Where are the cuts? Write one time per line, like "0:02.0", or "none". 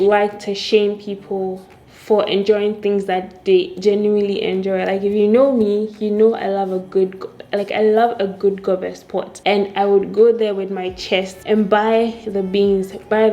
none